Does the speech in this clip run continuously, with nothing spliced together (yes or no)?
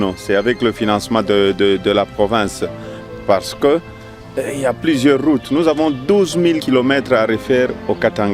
no